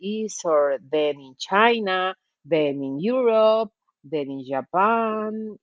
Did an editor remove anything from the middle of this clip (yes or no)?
no